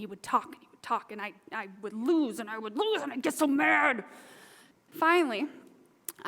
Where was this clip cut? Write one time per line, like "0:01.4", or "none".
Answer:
0:04.7